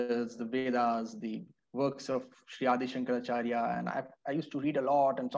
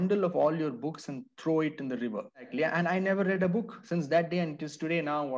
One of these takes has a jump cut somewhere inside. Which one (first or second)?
second